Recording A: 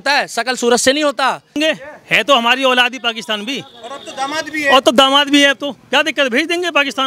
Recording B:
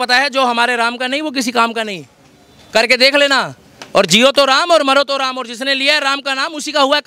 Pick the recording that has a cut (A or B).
A